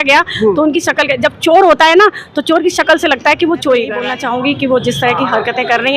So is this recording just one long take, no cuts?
no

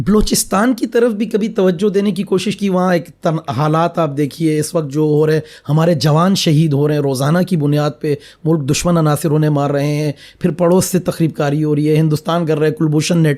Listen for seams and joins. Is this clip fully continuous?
yes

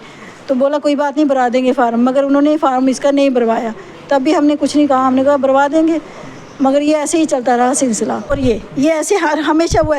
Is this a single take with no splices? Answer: no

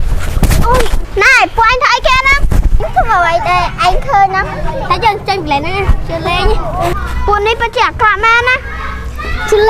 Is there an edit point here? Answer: yes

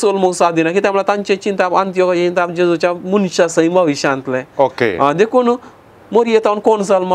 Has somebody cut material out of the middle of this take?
no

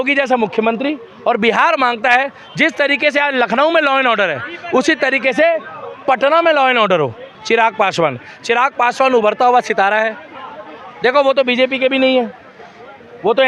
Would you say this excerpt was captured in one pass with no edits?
no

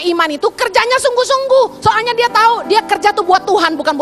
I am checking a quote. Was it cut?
no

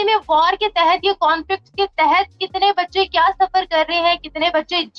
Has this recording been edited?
no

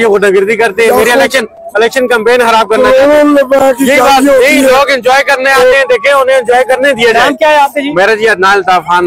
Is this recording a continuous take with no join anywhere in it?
yes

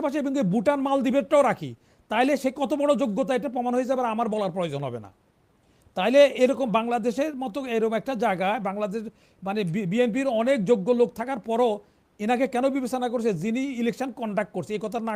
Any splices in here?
no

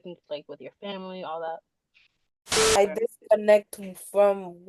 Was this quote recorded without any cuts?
no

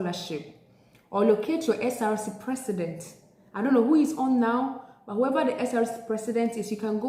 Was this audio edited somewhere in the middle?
no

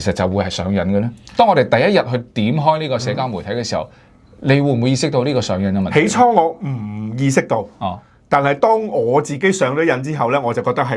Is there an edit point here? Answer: no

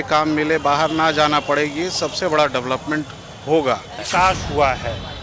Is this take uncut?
no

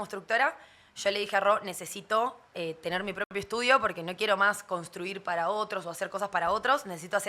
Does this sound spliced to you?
no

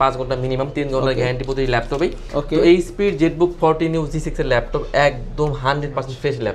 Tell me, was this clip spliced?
no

